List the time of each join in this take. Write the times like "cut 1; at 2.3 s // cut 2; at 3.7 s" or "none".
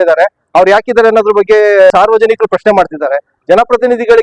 cut 1; at 1.9 s // cut 2; at 3.3 s

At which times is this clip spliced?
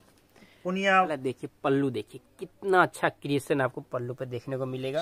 cut 1; at 1.2 s

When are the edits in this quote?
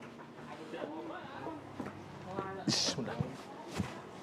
cut 1; at 1.4 s // cut 2; at 3.4 s

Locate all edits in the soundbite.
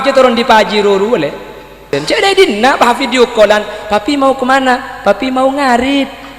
cut 1; at 1.8 s

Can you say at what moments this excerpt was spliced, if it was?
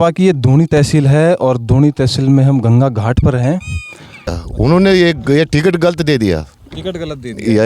cut 1; at 4.4 s

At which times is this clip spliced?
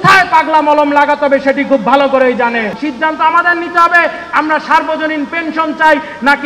cut 1; at 2.7 s

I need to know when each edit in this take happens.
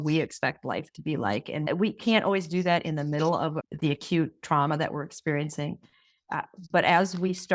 none

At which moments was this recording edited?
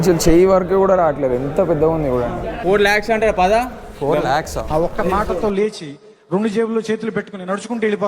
cut 1; at 2.5 s

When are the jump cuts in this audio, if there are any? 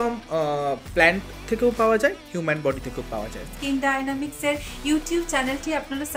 cut 1; at 3.5 s

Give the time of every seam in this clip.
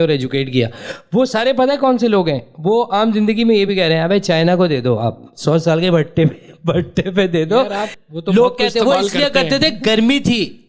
cut 1; at 7.9 s

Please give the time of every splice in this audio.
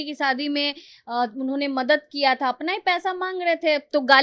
none

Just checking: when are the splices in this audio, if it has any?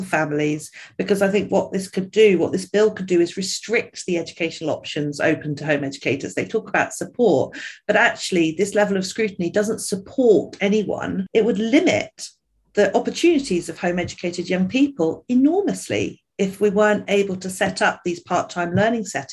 cut 1; at 11.1 s

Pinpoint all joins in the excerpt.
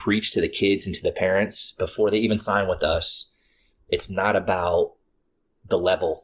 none

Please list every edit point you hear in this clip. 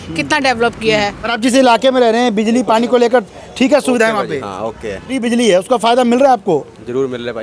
cut 1; at 1.3 s // cut 2; at 5.1 s

